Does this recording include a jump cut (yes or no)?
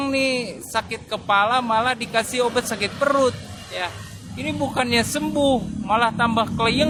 no